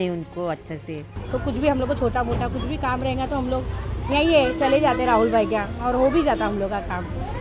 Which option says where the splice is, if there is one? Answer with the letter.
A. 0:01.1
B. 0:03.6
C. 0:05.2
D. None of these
A